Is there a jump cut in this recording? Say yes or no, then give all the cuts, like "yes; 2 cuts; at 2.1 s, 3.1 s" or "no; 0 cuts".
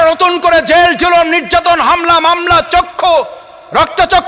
no; 0 cuts